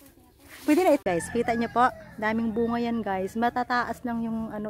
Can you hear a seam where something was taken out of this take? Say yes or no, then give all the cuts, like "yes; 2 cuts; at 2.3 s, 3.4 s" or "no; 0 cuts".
yes; 1 cut; at 1.0 s